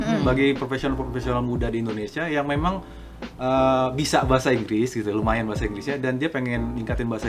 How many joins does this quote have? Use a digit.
0